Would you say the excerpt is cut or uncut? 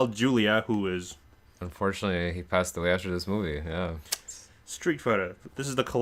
uncut